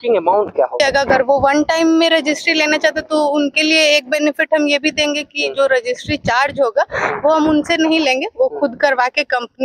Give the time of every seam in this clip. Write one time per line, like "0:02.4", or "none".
0:01.2

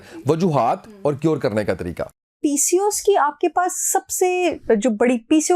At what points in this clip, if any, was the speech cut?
none

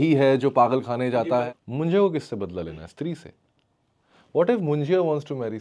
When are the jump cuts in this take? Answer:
0:01.4

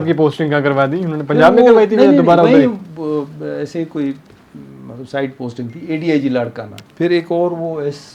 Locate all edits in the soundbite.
0:06.8

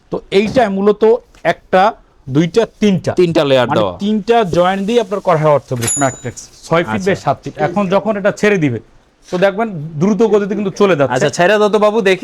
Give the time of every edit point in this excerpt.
0:05.9

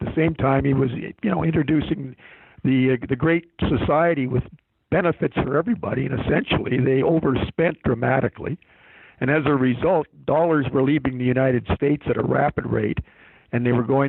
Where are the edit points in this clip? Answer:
none

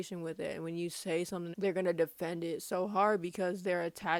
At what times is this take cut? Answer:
0:01.5

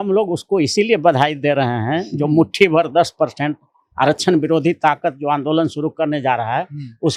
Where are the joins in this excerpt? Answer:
none

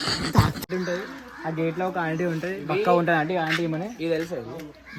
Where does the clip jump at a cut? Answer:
none

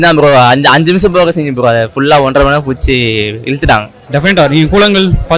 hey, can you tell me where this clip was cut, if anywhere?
0:04.0

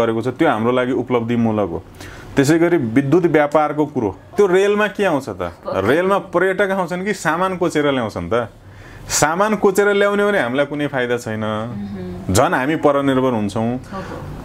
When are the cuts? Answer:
0:04.3

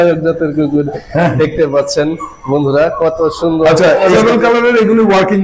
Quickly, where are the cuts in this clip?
0:04.1

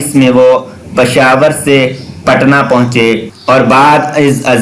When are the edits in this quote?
0:03.3

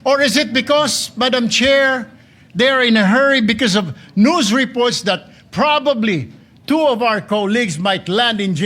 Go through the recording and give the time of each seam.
none

